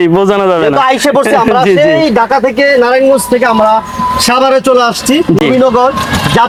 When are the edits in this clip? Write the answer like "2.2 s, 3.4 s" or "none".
none